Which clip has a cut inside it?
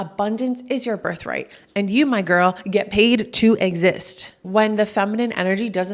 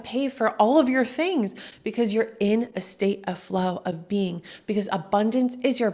first; 1 cut; at 4.4 s

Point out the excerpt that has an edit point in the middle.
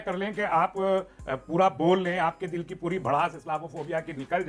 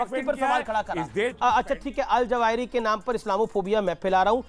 second; 1 cut; at 1.4 s

